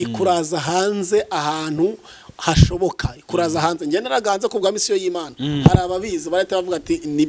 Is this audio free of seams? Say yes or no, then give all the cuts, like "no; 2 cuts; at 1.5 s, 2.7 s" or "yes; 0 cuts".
yes; 0 cuts